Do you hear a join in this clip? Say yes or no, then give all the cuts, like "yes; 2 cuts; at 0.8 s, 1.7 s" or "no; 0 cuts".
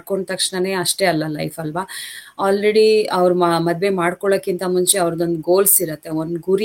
no; 0 cuts